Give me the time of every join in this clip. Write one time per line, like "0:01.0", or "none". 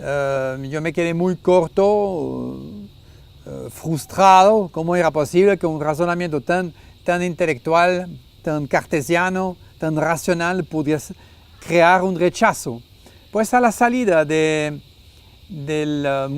0:15.1